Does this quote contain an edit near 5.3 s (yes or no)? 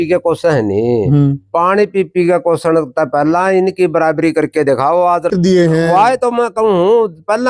yes